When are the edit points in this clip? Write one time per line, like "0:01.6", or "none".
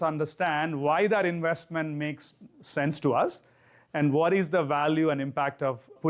none